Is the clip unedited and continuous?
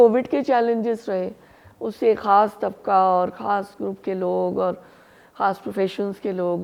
yes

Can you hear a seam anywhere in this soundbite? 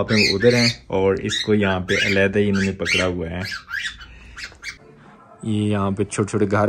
yes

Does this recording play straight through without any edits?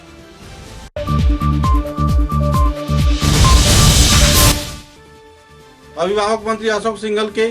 no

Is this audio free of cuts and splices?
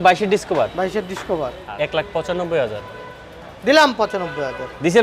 no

